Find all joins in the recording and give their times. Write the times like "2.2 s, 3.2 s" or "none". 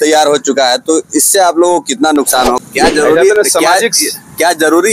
2.6 s